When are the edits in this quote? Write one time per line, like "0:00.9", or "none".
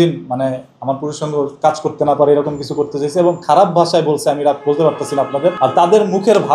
0:05.6